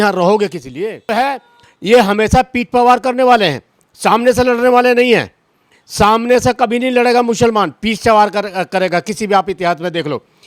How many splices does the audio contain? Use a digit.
1